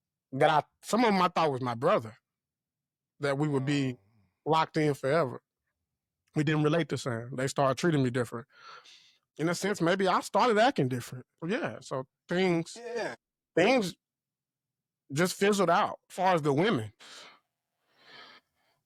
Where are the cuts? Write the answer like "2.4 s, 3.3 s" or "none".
none